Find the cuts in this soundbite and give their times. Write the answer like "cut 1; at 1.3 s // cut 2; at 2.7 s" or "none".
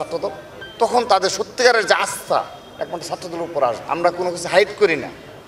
cut 1; at 3.8 s